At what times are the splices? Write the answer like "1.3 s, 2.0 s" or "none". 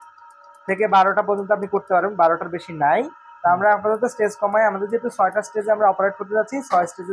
none